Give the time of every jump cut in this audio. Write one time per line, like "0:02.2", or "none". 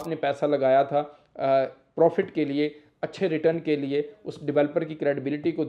none

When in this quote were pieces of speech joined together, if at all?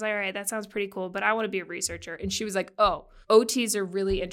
0:03.1

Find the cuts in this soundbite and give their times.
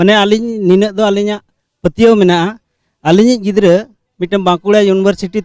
none

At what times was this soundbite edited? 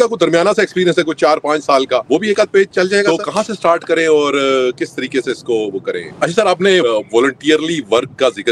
0:02.0
0:03.1
0:06.1
0:06.8

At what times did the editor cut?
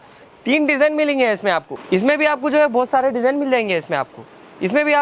0:01.7

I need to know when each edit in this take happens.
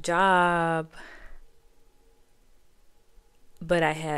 none

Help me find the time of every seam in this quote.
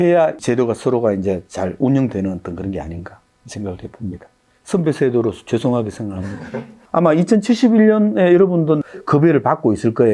0:08.8

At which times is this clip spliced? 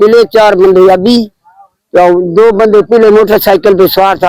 none

